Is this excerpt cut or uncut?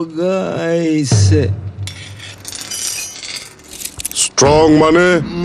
cut